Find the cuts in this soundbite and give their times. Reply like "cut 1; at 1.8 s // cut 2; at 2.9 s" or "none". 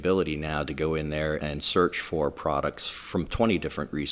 cut 1; at 1.4 s